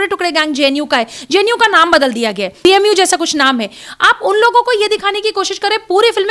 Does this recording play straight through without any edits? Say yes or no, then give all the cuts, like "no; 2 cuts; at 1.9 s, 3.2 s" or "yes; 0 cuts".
no; 1 cut; at 2.6 s